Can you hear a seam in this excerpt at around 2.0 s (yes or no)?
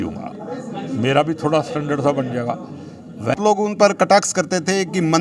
no